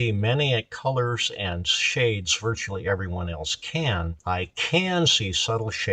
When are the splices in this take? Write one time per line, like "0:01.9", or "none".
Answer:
0:04.2